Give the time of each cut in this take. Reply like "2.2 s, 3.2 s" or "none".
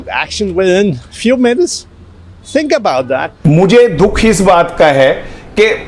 3.3 s